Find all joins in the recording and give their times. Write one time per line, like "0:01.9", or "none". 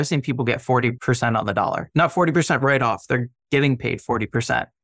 0:01.0
0:01.8